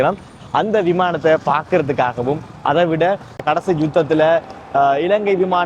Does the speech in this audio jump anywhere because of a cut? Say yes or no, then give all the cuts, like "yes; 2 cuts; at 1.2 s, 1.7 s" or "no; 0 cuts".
no; 0 cuts